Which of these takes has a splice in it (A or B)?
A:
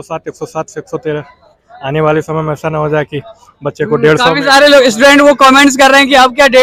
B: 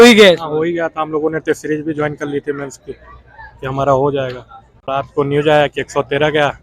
B